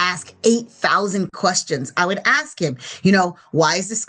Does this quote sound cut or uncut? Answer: uncut